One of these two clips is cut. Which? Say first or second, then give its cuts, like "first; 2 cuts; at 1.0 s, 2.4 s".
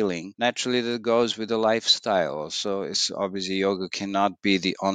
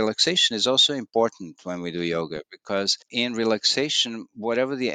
second; 1 cut; at 3.0 s